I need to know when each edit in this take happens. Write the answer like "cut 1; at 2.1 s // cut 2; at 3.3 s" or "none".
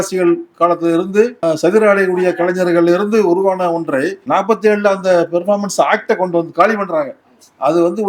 cut 1; at 1.4 s // cut 2; at 4.2 s